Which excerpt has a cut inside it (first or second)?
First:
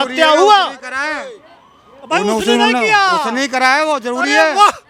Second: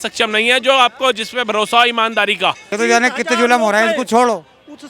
second